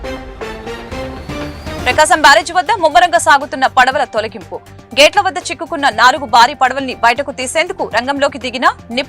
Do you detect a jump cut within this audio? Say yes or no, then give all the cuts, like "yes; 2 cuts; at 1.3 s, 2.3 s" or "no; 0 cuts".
yes; 1 cut; at 1.8 s